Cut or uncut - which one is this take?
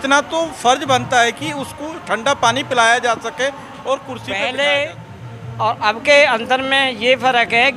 cut